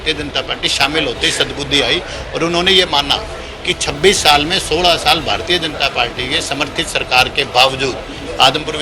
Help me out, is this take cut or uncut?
uncut